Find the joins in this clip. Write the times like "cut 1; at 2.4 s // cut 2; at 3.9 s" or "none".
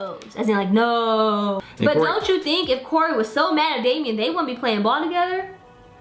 cut 1; at 1.6 s